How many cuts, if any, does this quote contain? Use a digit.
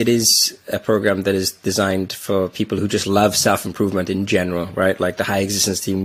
0